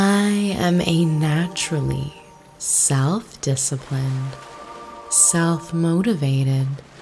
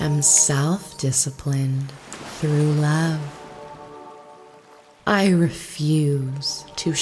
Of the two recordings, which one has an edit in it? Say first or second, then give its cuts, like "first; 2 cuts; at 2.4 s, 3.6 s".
second; 2 cuts; at 3.3 s, 4.9 s